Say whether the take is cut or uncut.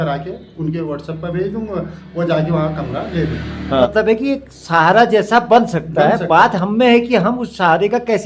cut